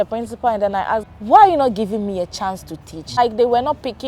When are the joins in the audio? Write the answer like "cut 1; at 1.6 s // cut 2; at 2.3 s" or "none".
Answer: cut 1; at 1.0 s // cut 2; at 3.2 s